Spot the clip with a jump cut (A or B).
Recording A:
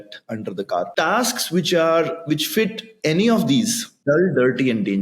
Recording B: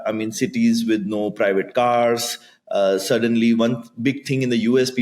A